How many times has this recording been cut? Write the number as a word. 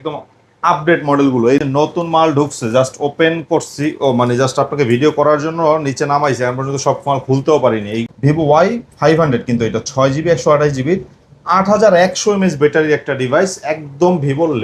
two